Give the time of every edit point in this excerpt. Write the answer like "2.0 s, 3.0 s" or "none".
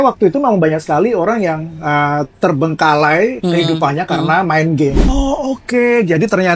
5.0 s